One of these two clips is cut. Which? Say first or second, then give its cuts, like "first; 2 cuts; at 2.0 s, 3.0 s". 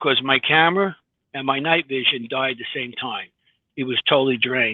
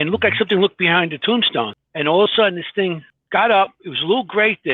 second; 2 cuts; at 1.8 s, 3.1 s